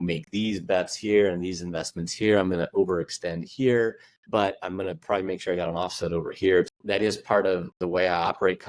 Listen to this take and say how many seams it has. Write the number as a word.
two